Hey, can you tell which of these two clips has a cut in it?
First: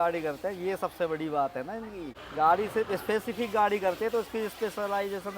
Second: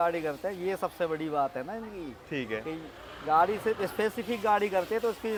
first; 1 cut; at 2.1 s

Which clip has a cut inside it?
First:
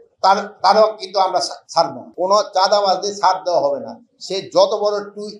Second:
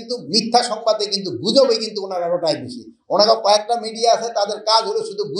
first; 1 cut; at 2.0 s

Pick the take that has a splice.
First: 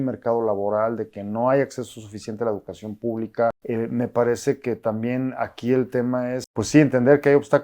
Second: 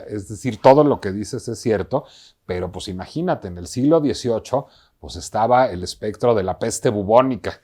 first; 2 cuts; at 3.6 s, 6.5 s

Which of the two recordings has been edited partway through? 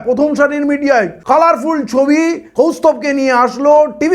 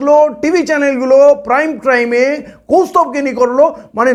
first; 2 cuts; at 1.2 s, 2.4 s

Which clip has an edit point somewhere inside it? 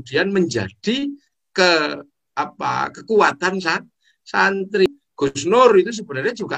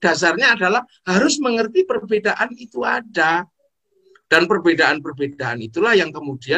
first; 1 cut; at 4.9 s

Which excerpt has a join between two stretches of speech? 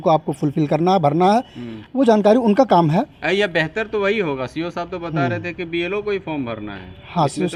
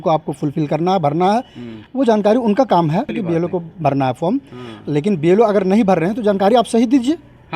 second; 1 cut; at 3.1 s

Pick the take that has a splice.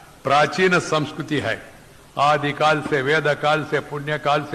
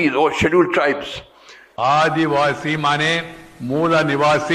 second; 1 cut; at 1.7 s

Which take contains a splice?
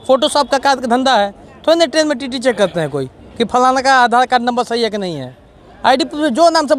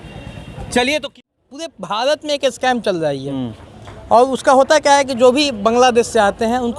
second; 1 cut; at 1.2 s

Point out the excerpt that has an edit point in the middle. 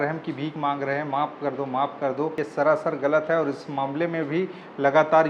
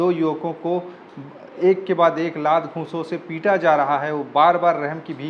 first; 1 cut; at 2.4 s

